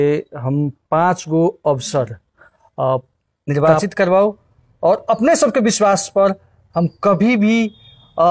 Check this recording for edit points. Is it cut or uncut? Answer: cut